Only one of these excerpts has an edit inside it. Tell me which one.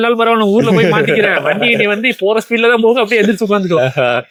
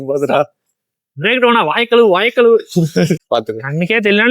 second; 1 cut; at 3.2 s

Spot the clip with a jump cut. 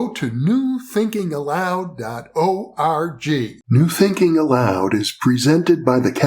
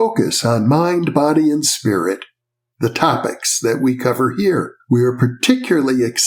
first; 1 cut; at 3.6 s

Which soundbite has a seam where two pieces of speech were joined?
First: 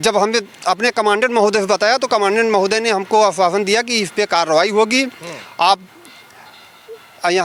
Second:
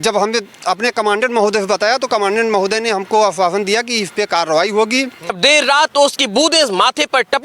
second; 1 cut; at 5.4 s

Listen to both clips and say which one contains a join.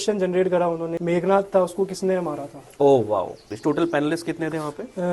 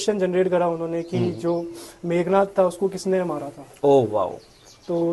first; 2 cuts; at 0.9 s, 3.5 s

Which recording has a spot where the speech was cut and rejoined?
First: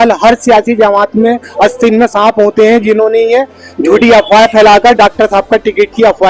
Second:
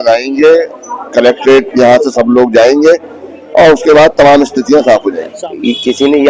second; 1 cut; at 5.4 s

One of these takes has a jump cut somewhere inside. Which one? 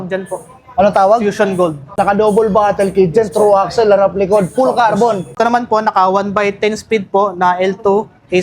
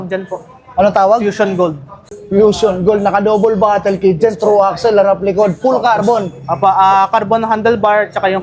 first; 2 cuts; at 1.9 s, 5.3 s

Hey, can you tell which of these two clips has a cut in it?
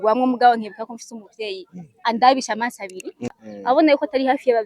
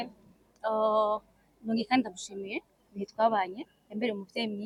first; 1 cut; at 3.4 s

